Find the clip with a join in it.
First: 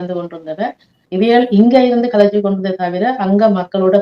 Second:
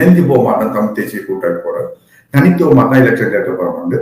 first; 1 cut; at 0.9 s

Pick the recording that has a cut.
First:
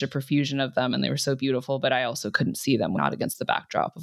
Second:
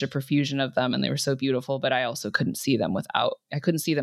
first; 1 cut; at 3.0 s

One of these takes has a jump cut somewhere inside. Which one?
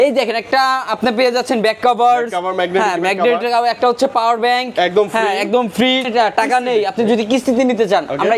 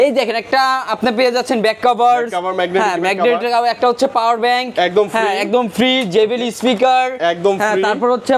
first; 1 cut; at 6.1 s

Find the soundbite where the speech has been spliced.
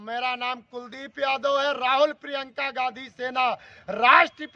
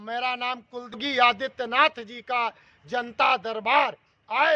second; 1 cut; at 1.0 s

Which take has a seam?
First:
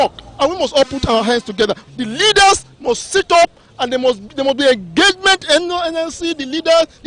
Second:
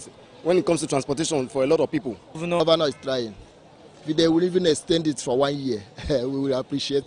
second; 1 cut; at 2.4 s

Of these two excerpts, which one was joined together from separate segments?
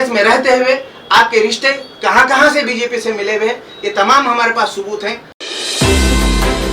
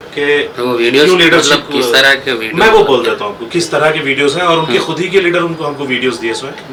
first; 1 cut; at 5.3 s

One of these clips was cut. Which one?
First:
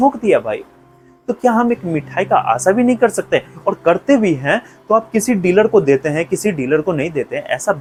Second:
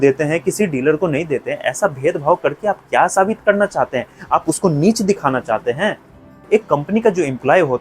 second; 1 cut; at 6.3 s

